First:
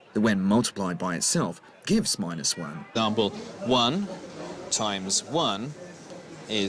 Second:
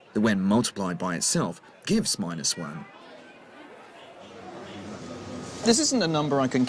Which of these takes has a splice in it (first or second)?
second